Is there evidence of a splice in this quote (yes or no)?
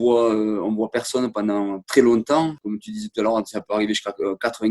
no